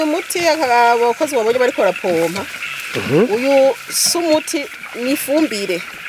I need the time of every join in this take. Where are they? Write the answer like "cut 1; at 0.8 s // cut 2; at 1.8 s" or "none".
none